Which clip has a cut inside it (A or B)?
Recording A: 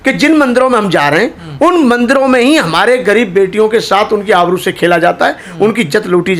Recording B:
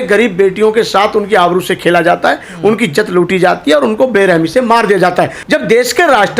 B